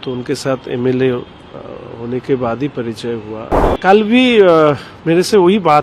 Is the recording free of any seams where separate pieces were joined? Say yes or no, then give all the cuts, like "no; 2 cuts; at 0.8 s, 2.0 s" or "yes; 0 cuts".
no; 1 cut; at 3.6 s